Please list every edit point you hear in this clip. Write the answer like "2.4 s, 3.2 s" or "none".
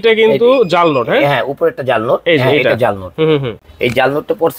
none